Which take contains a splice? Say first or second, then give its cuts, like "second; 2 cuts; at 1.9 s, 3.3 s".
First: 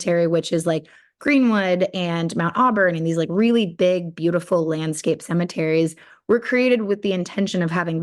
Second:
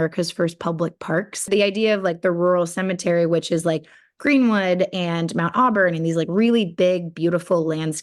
second; 1 cut; at 1.4 s